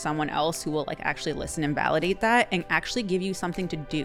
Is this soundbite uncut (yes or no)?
yes